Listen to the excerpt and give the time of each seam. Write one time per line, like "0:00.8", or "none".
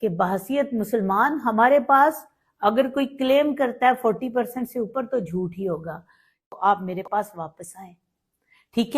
0:06.4